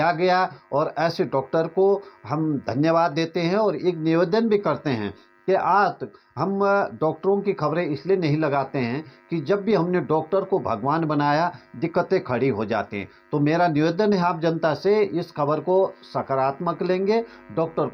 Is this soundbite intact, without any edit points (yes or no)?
yes